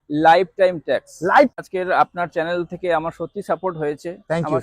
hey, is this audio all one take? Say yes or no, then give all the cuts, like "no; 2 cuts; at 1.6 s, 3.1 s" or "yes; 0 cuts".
no; 1 cut; at 1.5 s